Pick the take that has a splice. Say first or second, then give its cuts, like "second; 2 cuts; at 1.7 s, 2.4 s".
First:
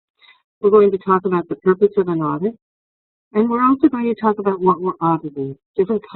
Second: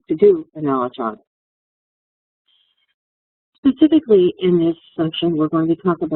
first; 1 cut; at 3.8 s